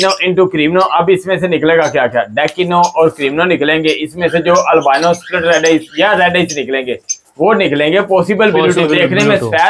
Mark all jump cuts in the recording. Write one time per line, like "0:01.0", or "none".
none